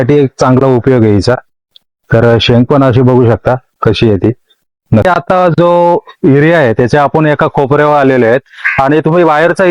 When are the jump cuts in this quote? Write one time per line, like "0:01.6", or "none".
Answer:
0:05.0